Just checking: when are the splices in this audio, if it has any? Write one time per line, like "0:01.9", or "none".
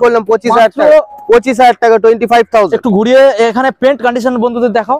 none